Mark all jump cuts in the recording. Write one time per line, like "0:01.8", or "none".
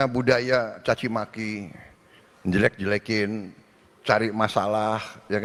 none